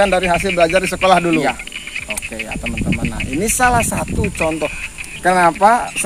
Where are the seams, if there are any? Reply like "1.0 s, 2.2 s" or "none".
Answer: none